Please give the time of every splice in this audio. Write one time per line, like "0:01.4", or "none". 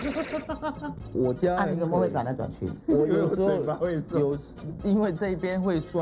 0:00.9